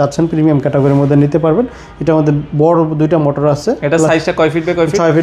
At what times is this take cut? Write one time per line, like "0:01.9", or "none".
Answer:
none

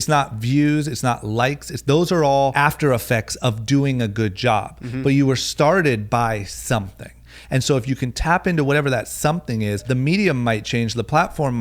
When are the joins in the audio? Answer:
0:02.5
0:09.8

